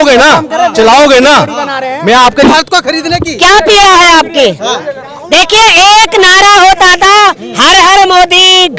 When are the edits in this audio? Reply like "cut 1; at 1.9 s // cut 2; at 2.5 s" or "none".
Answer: cut 1; at 2.5 s